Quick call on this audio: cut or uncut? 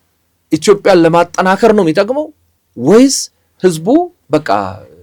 uncut